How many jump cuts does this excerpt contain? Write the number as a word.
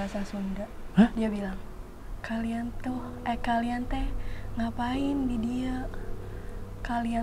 one